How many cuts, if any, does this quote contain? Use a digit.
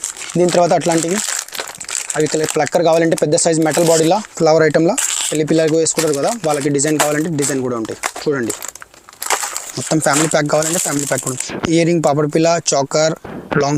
1